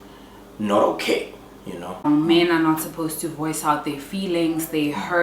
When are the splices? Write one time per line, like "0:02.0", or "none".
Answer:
0:02.1